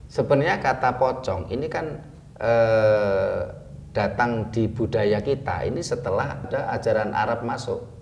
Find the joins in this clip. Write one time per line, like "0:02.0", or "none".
0:06.4